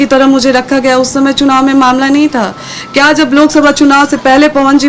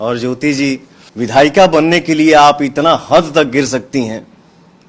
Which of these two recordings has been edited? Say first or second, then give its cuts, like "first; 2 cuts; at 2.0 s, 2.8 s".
second; 1 cut; at 1.0 s